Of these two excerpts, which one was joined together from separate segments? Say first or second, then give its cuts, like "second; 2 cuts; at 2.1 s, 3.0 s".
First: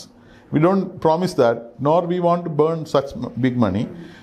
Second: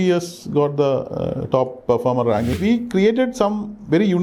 second; 1 cut; at 2.6 s